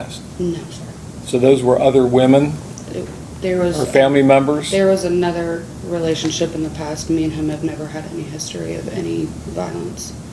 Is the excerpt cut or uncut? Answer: uncut